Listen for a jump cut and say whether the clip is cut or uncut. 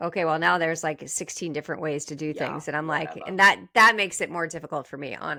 uncut